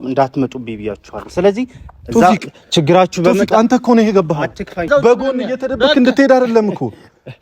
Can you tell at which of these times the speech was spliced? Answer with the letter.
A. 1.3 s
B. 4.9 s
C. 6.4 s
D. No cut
B